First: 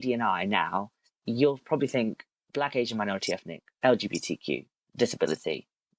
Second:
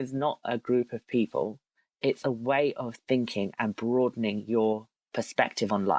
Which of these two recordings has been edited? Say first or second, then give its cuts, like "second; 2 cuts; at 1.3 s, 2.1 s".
first; 1 cut; at 1.2 s